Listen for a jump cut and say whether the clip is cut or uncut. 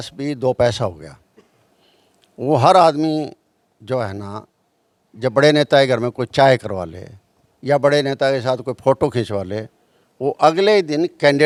uncut